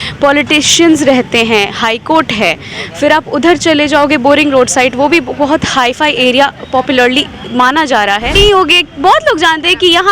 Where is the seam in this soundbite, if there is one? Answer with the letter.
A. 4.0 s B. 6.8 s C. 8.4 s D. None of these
C